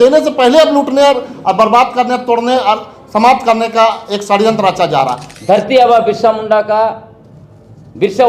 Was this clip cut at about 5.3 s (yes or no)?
yes